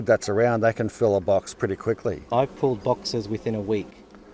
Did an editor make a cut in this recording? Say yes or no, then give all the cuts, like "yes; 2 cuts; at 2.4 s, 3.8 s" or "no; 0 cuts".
yes; 1 cut; at 2.2 s